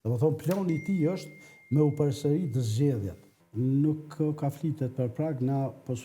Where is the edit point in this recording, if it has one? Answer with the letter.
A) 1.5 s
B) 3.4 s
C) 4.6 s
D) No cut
B